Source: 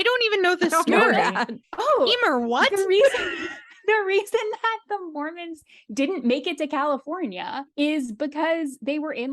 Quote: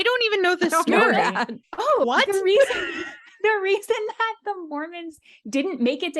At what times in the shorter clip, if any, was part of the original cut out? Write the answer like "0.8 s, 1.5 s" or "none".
2.0 s